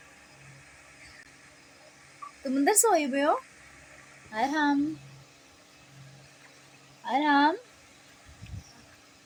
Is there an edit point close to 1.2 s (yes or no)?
no